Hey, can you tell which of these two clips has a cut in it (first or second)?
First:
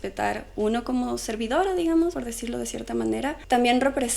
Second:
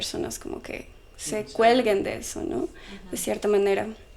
first